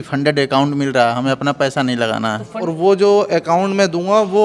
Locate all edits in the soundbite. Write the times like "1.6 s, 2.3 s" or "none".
2.6 s